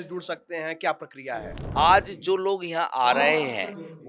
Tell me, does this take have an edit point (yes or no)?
yes